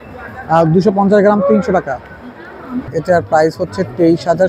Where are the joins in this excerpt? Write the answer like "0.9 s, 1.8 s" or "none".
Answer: 2.9 s